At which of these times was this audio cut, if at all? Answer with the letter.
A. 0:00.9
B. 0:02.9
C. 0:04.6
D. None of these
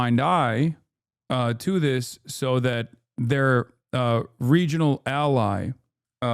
D